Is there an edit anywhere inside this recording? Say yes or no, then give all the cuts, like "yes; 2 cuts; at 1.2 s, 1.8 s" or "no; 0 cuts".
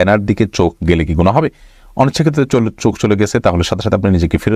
no; 0 cuts